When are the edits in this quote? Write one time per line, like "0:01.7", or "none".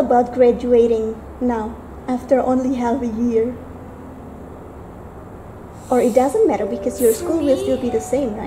none